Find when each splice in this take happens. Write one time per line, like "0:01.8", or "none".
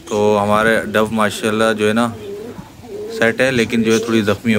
none